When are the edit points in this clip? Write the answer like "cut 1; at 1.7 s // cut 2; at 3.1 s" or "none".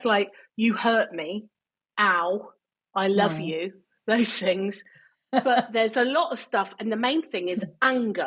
none